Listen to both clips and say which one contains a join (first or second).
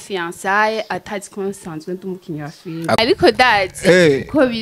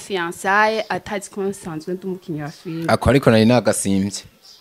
first